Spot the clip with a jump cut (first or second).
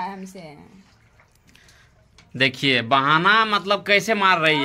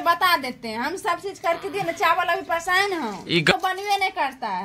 second